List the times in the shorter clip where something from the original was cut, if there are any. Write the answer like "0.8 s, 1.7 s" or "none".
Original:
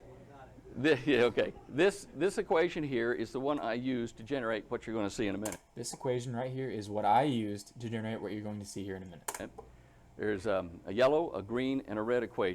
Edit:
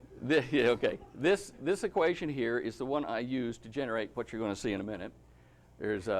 5.1 s